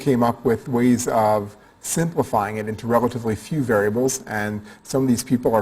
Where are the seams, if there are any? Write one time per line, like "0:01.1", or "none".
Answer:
0:03.3